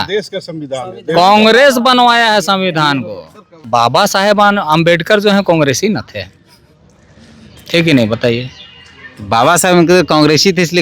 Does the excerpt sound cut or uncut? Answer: cut